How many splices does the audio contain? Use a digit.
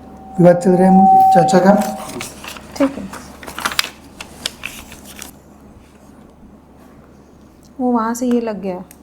1